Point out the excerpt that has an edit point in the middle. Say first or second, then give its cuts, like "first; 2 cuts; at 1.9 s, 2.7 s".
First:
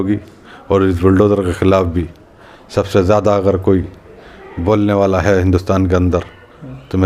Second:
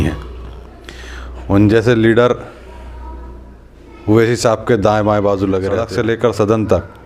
second; 1 cut; at 5.8 s